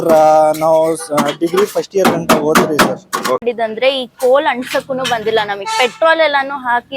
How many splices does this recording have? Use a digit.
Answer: 1